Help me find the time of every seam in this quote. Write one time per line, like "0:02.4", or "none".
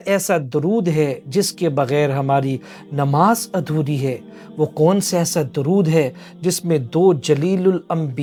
none